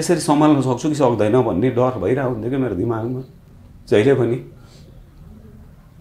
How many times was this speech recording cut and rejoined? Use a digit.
0